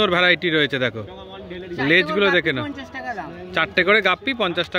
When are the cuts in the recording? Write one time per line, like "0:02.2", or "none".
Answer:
none